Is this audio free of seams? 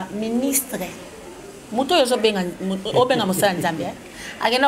yes; 0 cuts

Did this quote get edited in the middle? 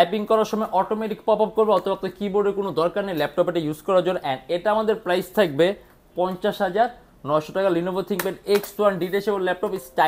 no; 0 cuts

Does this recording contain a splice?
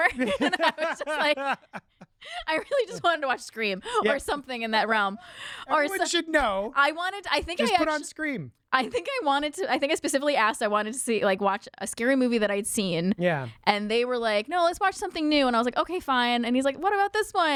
no; 0 cuts

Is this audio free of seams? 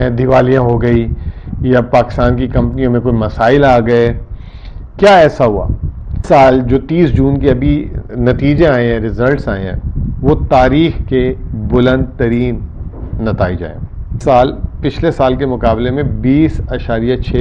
no; 2 cuts; at 6.2 s, 14.2 s

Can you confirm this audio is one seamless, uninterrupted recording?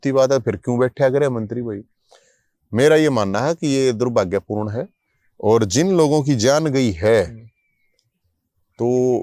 yes; 0 cuts

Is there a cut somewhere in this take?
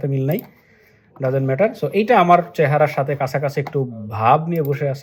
no; 0 cuts

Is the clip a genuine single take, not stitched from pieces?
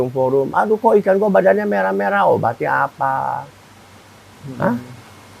yes; 0 cuts

